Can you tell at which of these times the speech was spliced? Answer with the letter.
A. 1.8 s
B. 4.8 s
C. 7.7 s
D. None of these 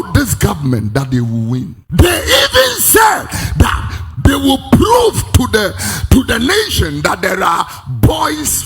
A